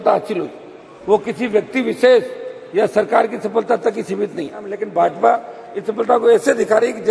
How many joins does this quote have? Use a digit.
1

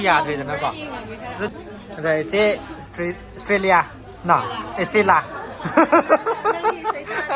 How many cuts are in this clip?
1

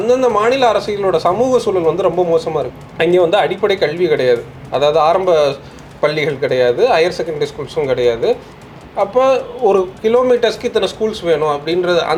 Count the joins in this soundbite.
0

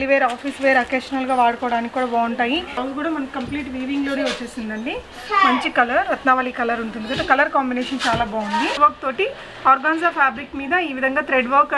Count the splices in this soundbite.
2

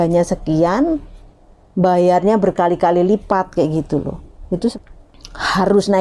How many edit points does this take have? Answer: 1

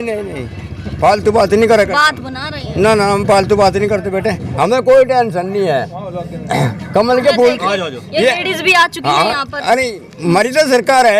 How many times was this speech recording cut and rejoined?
1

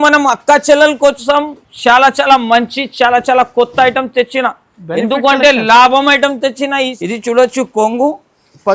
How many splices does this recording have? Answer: 1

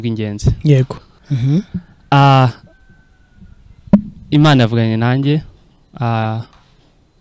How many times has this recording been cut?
1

